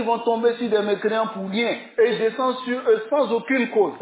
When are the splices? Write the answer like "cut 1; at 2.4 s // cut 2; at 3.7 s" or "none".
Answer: none